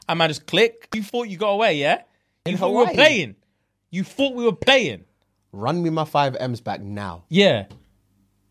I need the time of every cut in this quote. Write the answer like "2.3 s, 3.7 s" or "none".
1.0 s, 2.4 s